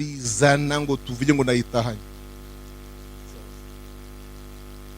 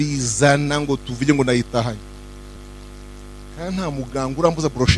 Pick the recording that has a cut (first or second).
second